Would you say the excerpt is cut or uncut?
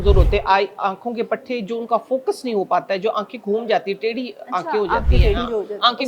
uncut